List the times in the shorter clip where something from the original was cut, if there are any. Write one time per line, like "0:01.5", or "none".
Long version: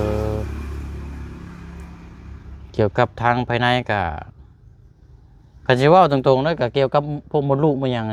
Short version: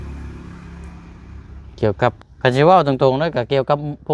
0:02.2